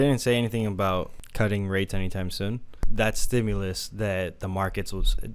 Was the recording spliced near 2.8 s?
yes; 2 cuts; at 1.2 s, 2.8 s

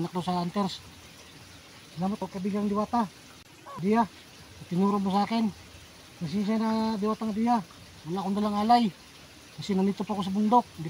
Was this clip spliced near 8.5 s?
no; 1 cut; at 2.2 s

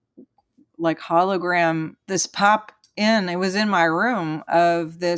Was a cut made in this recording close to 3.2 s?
no; 1 cut; at 2.0 s

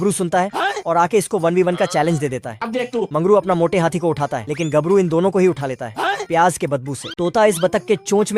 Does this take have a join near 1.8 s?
no; 1 cut; at 7.2 s

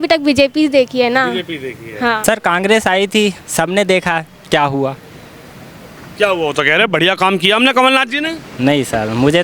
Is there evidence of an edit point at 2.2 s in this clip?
yes; 1 cut; at 2.2 s

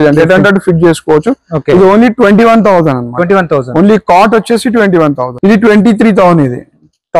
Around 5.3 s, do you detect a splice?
yes; 1 cut; at 5.3 s

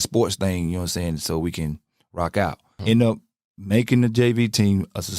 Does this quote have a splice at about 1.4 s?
no; 1 cut; at 2.7 s

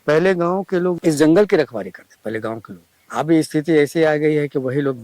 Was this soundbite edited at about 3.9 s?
no; 2 cuts; at 1.0 s, 2.0 s

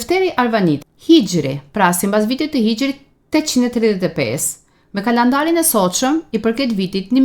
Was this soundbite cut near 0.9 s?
yes; 1 cut; at 0.9 s

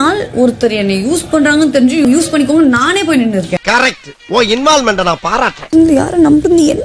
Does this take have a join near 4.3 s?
no; 2 cuts; at 2.1 s, 5.6 s

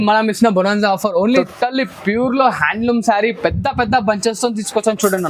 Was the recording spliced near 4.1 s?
no; 1 cut; at 1.5 s

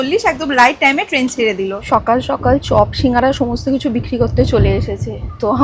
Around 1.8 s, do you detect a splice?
yes; 1 cut; at 1.8 s

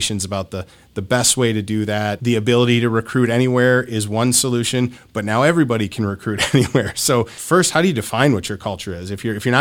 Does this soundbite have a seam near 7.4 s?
yes; 2 cuts; at 2.2 s, 7.4 s

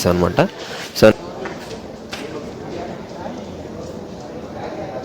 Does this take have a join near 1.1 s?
yes; 1 cut; at 1.1 s

